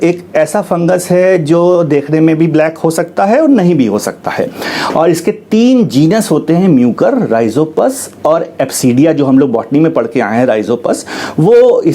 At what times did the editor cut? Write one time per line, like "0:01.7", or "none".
none